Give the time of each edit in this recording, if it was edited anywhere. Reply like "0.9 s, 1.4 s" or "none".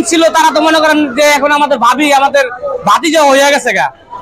none